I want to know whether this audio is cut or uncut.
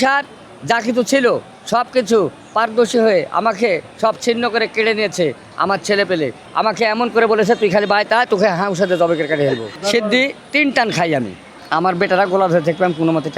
cut